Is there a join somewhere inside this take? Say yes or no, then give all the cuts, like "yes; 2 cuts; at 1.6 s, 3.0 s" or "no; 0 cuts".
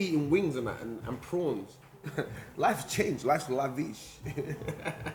no; 0 cuts